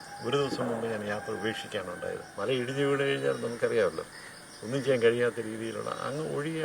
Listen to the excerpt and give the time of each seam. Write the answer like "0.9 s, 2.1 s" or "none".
2.3 s

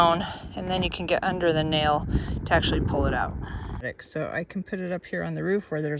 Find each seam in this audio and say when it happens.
3.7 s

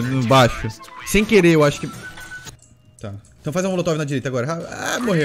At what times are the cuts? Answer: 2.4 s

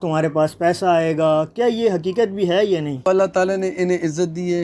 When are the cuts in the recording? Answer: 3.0 s

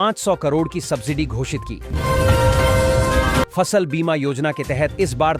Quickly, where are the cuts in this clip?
none

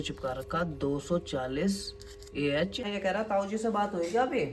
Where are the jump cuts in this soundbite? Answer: 2.9 s

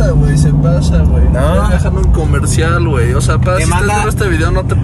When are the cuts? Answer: none

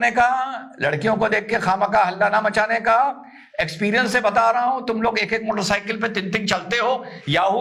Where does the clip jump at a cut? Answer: none

